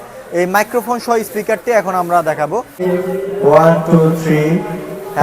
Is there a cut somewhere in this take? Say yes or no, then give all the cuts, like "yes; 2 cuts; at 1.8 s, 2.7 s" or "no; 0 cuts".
yes; 1 cut; at 2.8 s